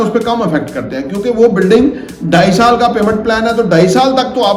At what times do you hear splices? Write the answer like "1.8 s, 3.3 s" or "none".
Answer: none